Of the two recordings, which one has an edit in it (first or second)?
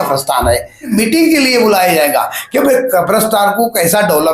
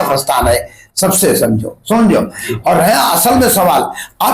first